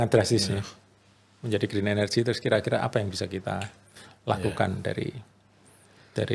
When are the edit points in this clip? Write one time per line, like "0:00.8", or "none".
none